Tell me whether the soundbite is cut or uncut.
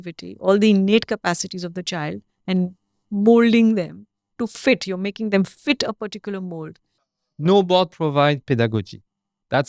cut